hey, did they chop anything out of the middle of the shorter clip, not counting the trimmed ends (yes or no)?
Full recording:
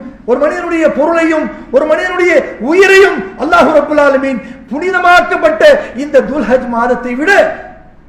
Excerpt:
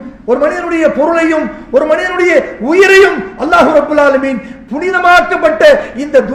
no